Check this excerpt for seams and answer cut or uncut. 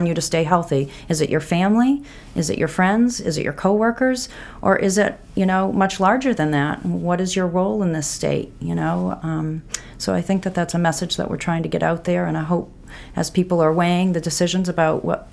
uncut